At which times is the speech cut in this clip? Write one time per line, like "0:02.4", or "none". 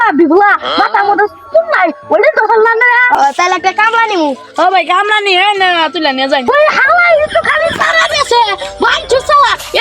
0:03.1
0:06.5

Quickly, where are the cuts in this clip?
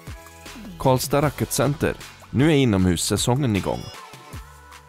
0:03.9

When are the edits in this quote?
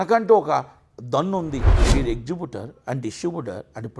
0:01.7

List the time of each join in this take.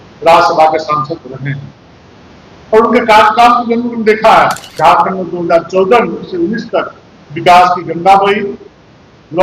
0:04.6

